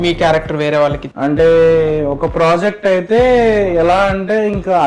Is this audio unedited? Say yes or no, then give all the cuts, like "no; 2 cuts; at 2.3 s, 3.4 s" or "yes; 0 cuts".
no; 1 cut; at 1.1 s